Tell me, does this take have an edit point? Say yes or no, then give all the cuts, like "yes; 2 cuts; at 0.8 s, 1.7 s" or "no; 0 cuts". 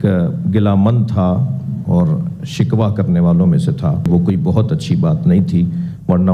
yes; 1 cut; at 4.1 s